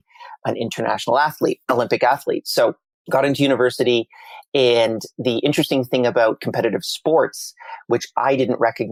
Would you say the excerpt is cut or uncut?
uncut